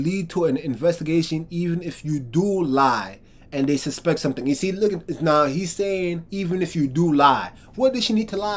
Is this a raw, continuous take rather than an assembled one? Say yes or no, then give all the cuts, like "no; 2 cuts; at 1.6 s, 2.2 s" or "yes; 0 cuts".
yes; 0 cuts